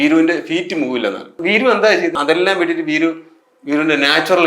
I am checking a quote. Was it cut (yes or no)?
yes